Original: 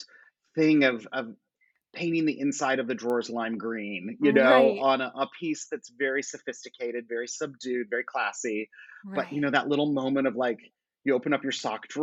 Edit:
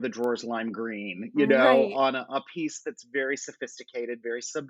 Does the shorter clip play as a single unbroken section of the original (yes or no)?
yes